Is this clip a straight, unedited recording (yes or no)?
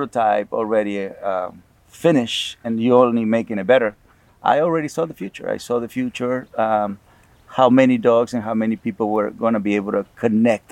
yes